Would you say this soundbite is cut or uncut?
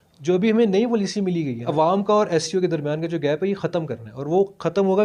cut